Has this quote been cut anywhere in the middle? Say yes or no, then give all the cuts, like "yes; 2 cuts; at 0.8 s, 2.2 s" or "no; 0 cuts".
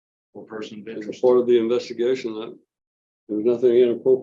no; 0 cuts